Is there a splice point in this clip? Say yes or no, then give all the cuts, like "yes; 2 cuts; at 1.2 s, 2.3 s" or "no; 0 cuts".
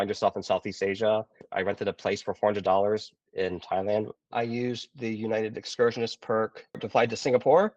yes; 2 cuts; at 1.4 s, 4.2 s